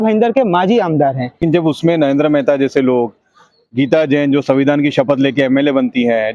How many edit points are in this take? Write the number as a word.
one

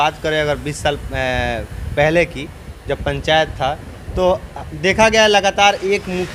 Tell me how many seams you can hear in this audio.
zero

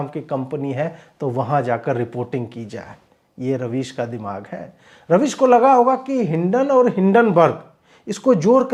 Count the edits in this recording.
zero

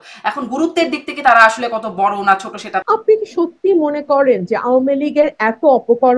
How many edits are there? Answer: one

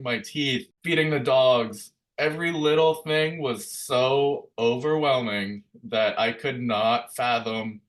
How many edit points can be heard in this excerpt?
zero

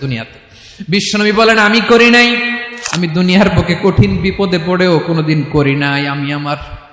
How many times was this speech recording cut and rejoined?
one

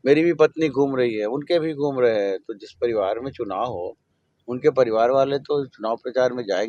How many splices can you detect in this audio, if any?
zero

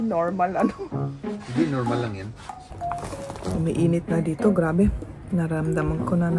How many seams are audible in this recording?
one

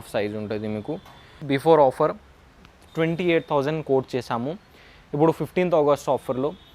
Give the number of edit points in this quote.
one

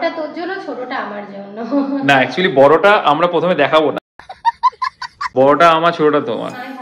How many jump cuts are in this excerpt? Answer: zero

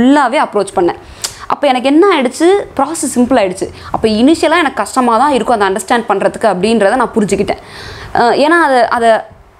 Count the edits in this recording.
zero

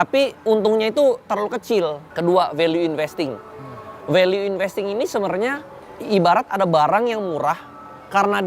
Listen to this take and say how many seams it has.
two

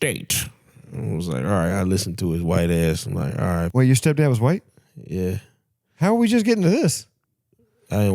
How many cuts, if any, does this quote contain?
one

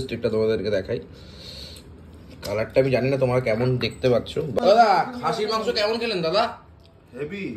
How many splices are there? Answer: one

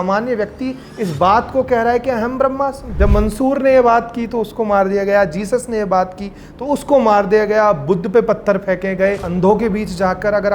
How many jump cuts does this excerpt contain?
two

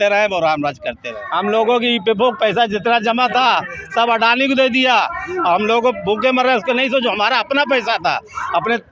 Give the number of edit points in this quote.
one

